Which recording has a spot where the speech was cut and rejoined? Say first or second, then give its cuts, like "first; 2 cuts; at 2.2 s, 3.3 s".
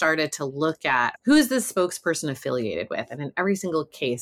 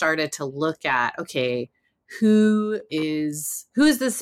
first; 1 cut; at 1.1 s